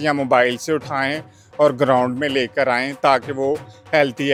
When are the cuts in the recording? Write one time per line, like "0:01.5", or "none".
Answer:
none